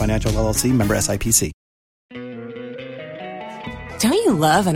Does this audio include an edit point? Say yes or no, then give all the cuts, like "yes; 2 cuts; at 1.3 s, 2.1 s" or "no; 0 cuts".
yes; 1 cut; at 2.1 s